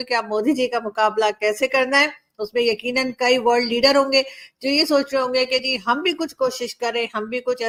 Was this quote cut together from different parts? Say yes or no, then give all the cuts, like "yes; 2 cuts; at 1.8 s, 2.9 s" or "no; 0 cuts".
no; 0 cuts